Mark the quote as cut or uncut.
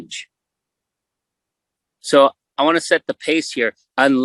uncut